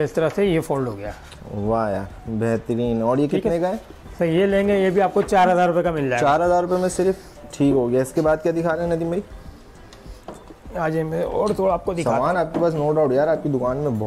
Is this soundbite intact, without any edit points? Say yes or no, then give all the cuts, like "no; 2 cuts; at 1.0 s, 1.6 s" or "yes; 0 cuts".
yes; 0 cuts